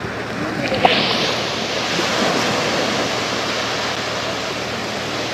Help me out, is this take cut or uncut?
uncut